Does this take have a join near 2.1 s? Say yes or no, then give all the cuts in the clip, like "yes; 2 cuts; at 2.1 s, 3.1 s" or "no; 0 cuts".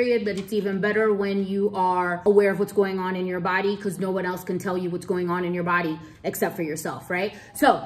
yes; 1 cut; at 2.1 s